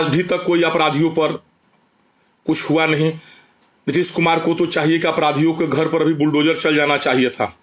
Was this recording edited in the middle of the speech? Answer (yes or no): no